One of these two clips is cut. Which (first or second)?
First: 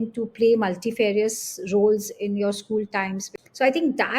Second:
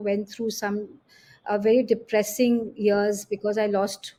first